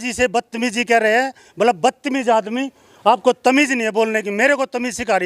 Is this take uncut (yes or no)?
yes